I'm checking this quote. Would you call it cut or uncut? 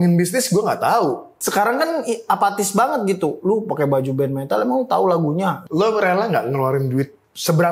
cut